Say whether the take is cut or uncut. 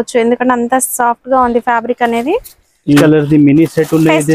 cut